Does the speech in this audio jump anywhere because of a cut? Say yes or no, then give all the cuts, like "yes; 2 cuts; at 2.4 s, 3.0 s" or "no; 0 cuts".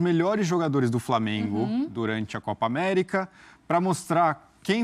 no; 0 cuts